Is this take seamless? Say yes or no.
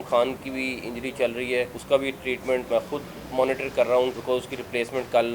no